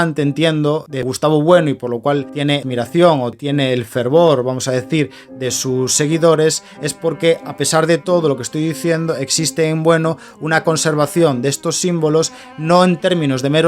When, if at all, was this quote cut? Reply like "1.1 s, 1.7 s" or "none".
0.9 s, 2.5 s, 3.3 s